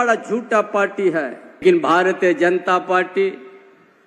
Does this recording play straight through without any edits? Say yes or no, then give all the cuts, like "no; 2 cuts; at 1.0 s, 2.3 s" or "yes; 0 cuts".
no; 1 cut; at 1.6 s